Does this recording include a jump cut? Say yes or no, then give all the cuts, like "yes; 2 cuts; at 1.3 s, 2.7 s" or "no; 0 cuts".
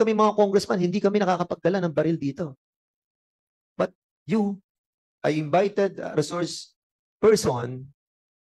no; 0 cuts